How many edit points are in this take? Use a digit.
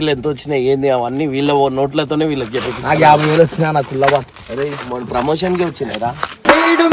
0